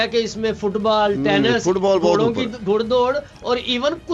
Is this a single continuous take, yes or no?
yes